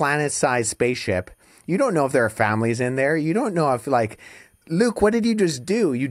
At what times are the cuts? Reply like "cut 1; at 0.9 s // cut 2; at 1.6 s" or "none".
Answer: none